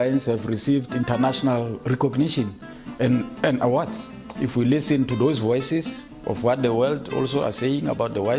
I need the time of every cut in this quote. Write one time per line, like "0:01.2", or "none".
0:04.2